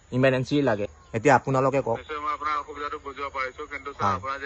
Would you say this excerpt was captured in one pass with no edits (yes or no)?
no